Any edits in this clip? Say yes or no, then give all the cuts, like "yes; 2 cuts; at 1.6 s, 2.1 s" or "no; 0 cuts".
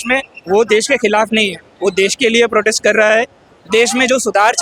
no; 0 cuts